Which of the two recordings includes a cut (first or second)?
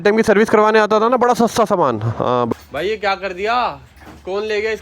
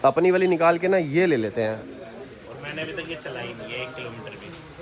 first